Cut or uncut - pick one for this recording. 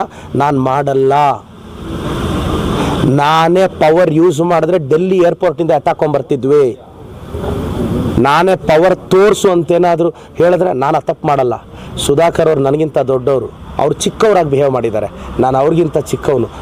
uncut